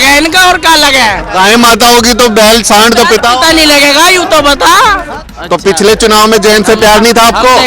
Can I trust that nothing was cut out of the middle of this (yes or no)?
no